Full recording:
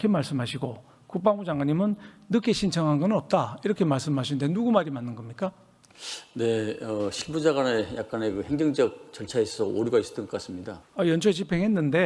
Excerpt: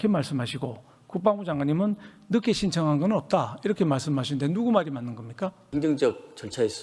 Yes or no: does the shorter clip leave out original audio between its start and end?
yes